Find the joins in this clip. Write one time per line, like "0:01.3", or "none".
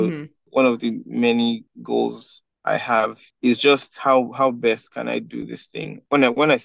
0:03.2